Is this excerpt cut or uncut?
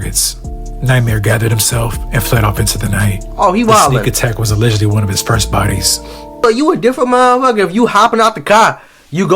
cut